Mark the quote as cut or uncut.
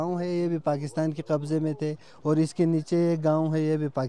uncut